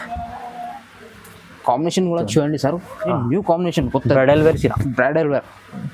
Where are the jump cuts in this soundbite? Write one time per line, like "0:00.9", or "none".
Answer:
none